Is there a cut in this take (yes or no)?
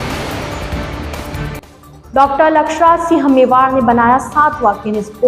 no